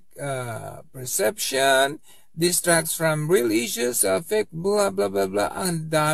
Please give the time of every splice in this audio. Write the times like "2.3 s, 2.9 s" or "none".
none